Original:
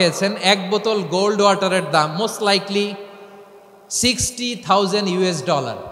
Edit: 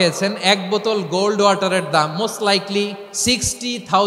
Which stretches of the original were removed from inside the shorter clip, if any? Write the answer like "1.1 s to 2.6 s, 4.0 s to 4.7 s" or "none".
3.1 s to 3.8 s